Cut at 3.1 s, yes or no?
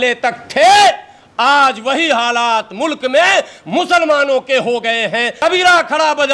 no